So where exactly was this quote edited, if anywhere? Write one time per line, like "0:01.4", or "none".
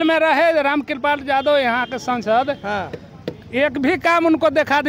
none